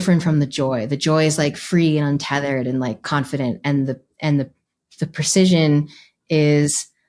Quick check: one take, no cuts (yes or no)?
yes